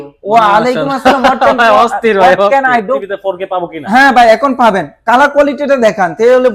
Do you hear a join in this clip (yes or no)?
yes